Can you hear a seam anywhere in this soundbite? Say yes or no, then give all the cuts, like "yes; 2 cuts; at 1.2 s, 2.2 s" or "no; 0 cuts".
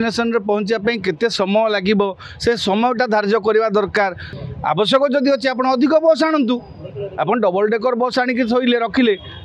yes; 1 cut; at 4.3 s